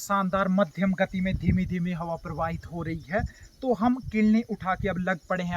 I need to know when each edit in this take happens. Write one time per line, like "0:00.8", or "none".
none